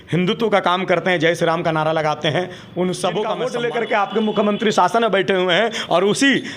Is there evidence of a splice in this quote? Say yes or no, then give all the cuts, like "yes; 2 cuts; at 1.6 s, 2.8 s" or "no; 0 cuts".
yes; 1 cut; at 3.4 s